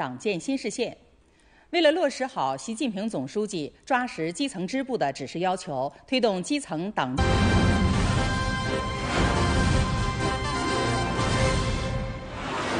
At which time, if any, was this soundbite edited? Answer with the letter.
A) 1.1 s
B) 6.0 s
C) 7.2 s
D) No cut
D